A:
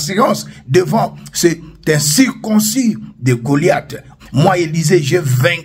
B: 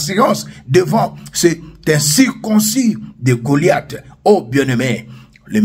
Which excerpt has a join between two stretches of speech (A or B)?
A